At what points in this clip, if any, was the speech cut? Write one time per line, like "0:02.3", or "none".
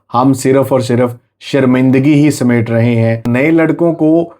0:03.2